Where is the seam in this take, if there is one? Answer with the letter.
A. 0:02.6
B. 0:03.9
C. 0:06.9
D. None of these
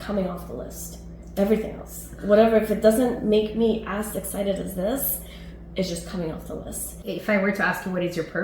C